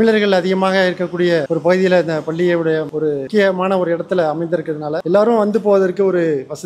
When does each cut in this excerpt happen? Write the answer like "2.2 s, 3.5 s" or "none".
none